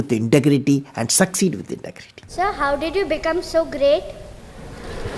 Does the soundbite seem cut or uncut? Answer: cut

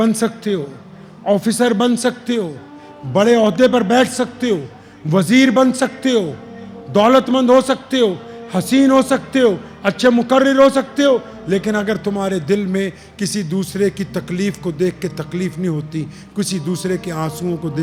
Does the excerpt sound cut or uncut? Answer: uncut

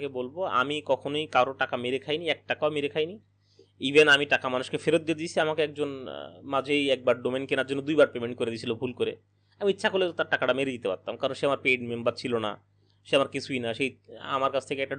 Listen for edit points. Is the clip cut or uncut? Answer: uncut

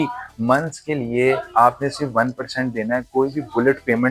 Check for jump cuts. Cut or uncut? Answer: uncut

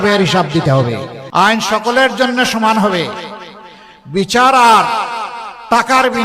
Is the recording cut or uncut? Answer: cut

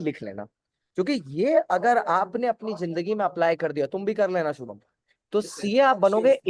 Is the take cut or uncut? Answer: uncut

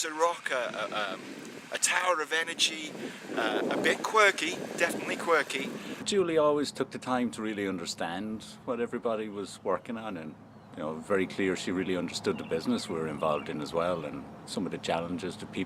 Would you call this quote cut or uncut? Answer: uncut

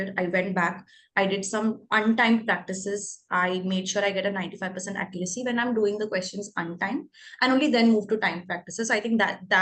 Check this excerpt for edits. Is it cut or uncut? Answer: uncut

